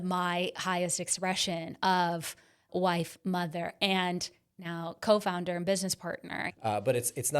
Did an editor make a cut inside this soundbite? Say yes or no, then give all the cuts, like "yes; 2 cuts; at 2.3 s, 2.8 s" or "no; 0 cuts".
yes; 2 cuts; at 2.6 s, 6.5 s